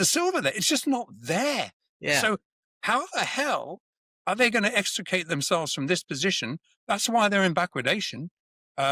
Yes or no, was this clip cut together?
no